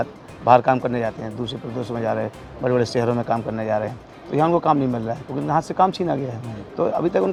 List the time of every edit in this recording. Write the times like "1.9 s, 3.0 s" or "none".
none

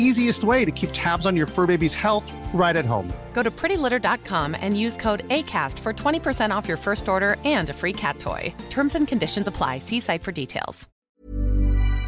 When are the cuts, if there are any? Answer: 10.9 s

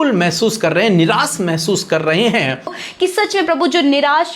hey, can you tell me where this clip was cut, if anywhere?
2.8 s

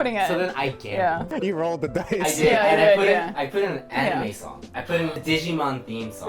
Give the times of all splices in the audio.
1.4 s, 5.2 s

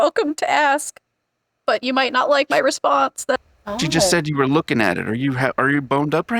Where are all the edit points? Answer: 3.3 s

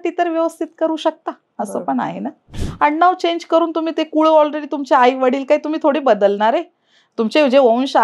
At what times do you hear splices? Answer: 2.5 s

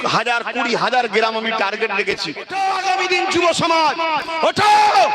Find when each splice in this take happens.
2.5 s

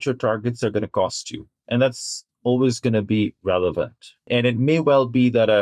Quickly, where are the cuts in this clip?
1.6 s, 4.1 s

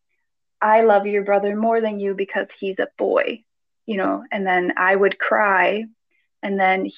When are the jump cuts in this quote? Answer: none

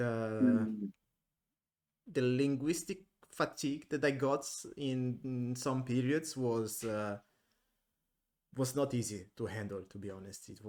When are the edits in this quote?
none

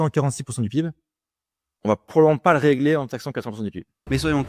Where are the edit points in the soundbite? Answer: none

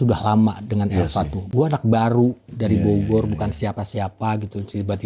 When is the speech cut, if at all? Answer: 1.4 s

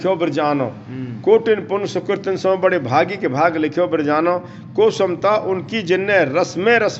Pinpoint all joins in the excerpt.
none

